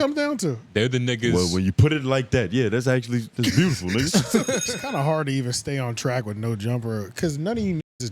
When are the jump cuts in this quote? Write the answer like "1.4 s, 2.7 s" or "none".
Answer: 4.7 s